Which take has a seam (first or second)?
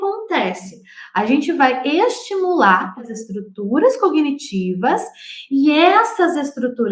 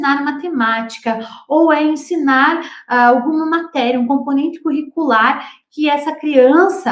first